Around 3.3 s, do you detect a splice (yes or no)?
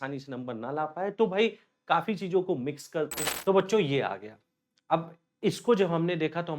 yes